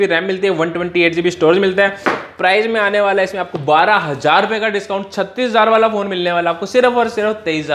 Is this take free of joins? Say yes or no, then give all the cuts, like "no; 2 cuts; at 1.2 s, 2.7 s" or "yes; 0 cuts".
yes; 0 cuts